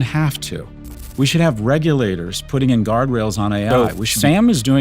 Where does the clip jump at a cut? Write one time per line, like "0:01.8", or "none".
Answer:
0:03.7